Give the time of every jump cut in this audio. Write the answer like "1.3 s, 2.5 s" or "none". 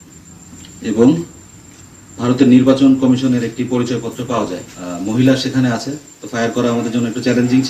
4.7 s